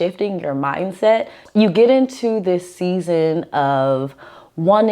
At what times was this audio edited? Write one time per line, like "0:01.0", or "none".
0:01.4